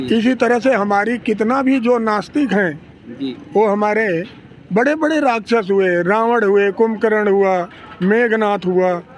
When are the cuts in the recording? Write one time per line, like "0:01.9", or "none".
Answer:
none